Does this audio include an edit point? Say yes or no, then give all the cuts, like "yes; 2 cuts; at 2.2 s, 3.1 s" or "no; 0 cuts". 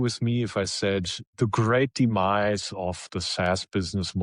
no; 0 cuts